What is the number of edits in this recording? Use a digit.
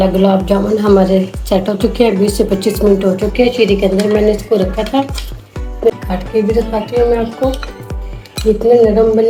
0